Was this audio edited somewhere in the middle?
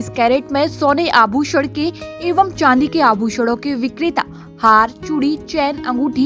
no; 0 cuts

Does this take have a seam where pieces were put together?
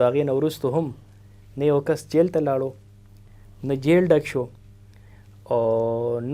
no; 0 cuts

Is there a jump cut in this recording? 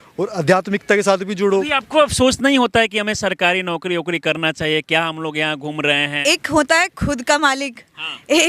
yes; 2 cuts; at 1.8 s, 6.2 s

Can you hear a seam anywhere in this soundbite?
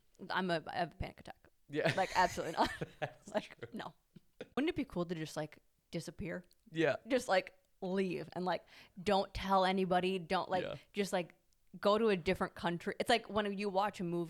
yes; 1 cut; at 4.6 s

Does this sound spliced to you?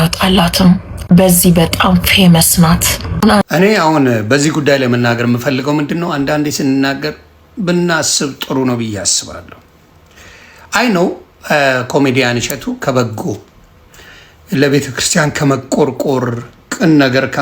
yes; 1 cut; at 3.4 s

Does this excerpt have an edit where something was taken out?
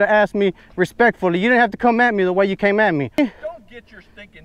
yes; 1 cut; at 3.2 s

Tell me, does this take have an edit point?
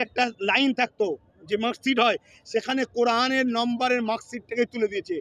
no; 0 cuts

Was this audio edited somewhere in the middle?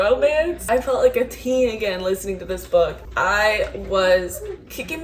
no; 0 cuts

